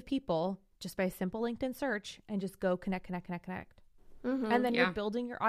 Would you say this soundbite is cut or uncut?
uncut